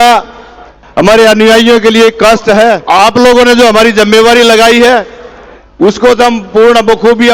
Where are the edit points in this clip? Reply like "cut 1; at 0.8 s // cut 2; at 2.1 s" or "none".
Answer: cut 1; at 2.8 s